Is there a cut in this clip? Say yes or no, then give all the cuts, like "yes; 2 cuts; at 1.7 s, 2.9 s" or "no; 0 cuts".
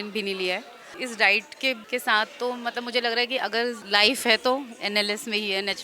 yes; 3 cuts; at 1.0 s, 1.8 s, 3.8 s